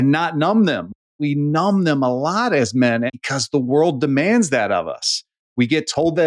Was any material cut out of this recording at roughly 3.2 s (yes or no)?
yes